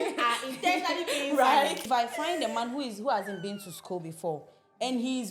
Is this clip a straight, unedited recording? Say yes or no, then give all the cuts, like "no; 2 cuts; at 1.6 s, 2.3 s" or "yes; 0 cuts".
no; 1 cut; at 1.8 s